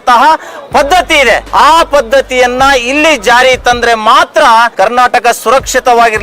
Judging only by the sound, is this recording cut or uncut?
cut